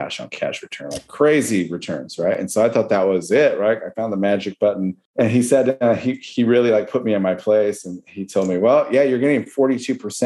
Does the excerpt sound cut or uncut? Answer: cut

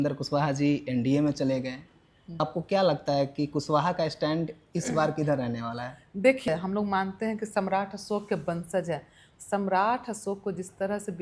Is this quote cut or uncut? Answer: cut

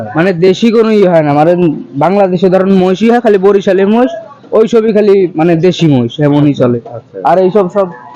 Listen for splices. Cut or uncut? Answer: uncut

